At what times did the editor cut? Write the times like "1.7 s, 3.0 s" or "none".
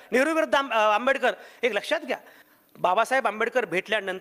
2.3 s